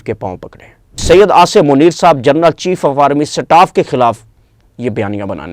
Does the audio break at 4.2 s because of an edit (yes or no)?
no